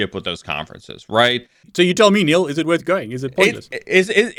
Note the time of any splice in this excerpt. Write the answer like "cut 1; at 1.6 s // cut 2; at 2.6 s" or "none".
cut 1; at 1.7 s